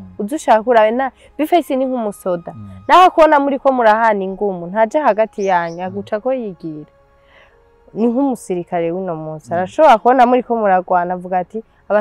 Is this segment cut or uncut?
uncut